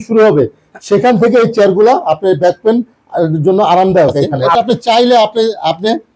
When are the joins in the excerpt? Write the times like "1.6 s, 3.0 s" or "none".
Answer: 4.4 s